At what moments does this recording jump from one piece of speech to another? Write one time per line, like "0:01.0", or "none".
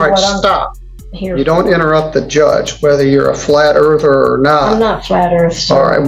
none